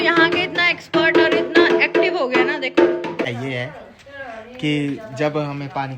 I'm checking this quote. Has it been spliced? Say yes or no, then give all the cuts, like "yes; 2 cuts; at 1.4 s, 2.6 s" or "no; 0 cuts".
yes; 1 cut; at 3.3 s